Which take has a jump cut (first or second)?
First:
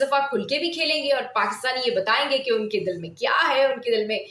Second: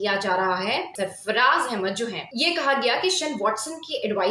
second